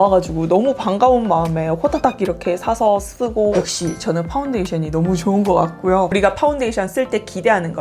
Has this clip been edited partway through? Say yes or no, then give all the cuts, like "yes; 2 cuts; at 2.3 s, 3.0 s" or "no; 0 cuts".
yes; 2 cuts; at 3.5 s, 6.1 s